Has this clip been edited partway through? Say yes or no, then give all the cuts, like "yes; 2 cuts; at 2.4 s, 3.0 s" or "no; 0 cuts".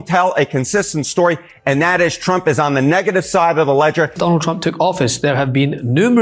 yes; 1 cut; at 4.2 s